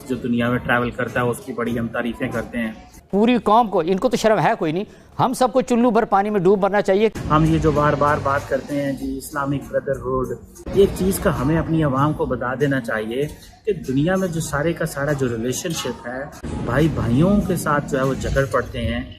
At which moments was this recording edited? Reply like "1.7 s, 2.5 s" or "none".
2.9 s, 7.1 s